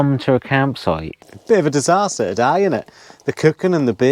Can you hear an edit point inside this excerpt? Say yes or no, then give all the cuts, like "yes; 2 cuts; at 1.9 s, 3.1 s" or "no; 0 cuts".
yes; 1 cut; at 1.3 s